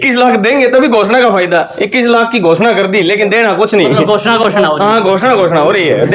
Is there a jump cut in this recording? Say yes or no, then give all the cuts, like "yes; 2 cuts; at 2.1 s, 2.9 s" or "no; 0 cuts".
no; 0 cuts